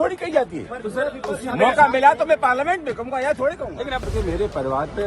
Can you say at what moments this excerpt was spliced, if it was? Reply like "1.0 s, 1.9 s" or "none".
4.0 s

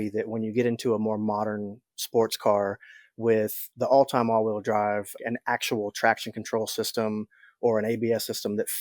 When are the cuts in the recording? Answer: 3.6 s, 5.1 s

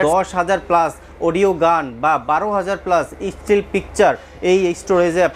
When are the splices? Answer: none

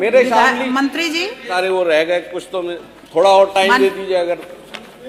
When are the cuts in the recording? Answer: 1.5 s

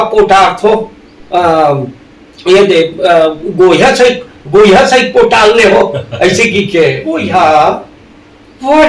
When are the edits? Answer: 7.2 s

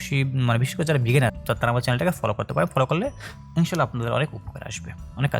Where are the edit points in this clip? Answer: 1.3 s

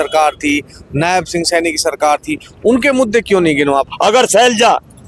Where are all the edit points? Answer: 3.9 s

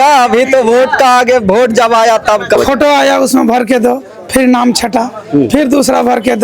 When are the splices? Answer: 2.5 s

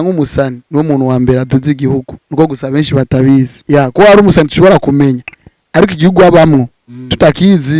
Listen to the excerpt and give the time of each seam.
3.6 s

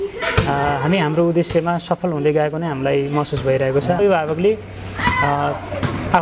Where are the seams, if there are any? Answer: 4.0 s

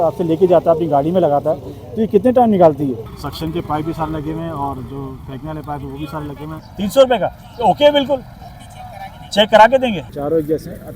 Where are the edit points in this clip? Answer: 3.1 s, 6.7 s, 10.1 s

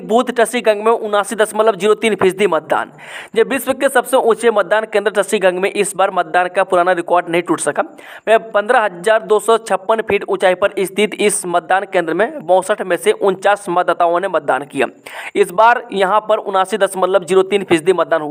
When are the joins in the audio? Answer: none

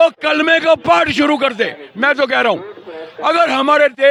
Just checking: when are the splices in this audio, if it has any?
none

